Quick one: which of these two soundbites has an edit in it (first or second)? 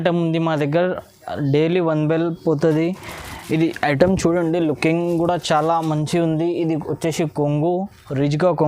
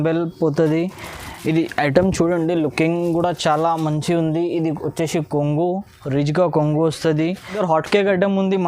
second